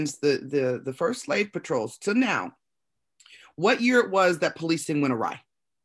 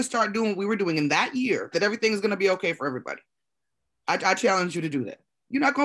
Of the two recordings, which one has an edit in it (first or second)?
second